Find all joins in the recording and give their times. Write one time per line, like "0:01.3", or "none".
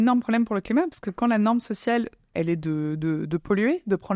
0:02.3